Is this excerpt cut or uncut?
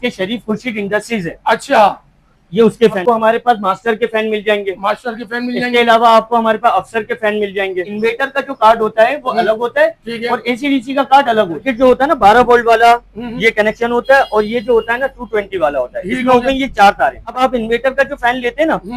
cut